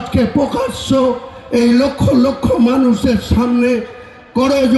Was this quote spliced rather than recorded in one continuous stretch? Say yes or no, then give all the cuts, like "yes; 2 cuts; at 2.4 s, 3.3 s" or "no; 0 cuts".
no; 0 cuts